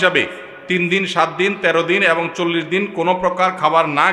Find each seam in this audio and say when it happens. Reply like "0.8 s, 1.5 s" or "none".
none